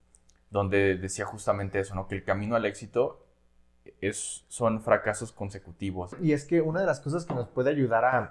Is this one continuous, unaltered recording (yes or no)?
no